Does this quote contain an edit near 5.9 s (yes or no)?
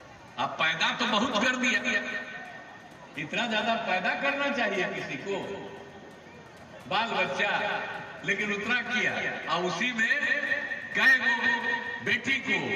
no